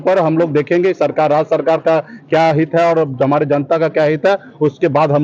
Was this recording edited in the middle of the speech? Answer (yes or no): no